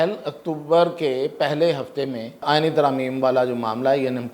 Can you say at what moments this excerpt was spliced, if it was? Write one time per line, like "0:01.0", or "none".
0:02.4